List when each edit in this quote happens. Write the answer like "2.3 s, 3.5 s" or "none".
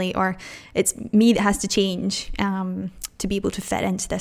none